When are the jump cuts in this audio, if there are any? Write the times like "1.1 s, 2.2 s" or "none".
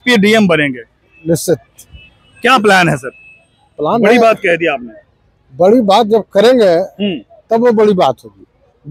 none